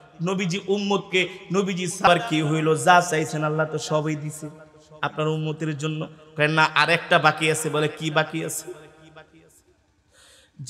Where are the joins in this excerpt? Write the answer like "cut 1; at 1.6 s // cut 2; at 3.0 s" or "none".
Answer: cut 1; at 2.1 s

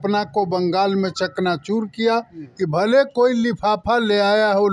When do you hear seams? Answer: cut 1; at 2.4 s

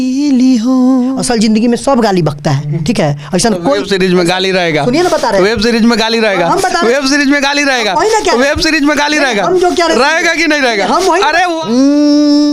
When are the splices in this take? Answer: cut 1; at 1.1 s // cut 2; at 11.6 s

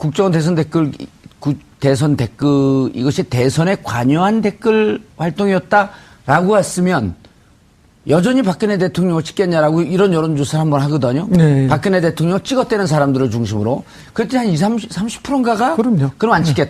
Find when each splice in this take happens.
cut 1; at 5.3 s

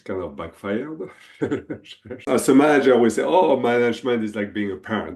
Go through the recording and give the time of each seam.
cut 1; at 2.3 s

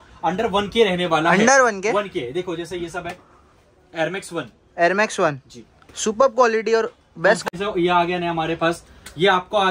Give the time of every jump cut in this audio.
cut 1; at 7.5 s

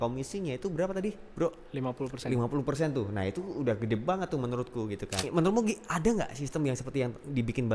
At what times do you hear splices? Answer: cut 1; at 5.3 s

